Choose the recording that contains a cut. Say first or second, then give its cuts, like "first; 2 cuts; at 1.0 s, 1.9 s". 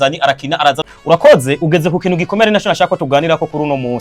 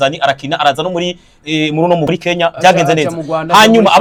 first; 1 cut; at 0.9 s